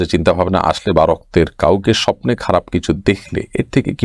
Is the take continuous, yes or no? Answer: yes